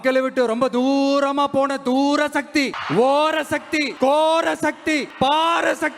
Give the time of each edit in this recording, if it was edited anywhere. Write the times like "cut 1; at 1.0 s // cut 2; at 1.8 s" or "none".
cut 1; at 2.8 s // cut 2; at 3.9 s // cut 3; at 5.1 s